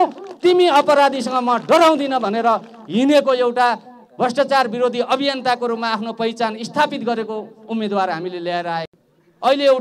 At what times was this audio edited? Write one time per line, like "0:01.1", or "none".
none